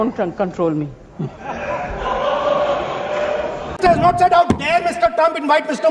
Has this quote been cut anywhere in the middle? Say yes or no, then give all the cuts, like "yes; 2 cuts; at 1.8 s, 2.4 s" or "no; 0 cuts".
no; 0 cuts